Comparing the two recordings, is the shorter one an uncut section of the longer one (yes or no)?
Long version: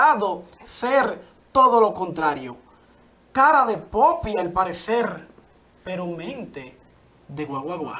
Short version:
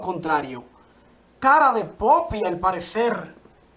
yes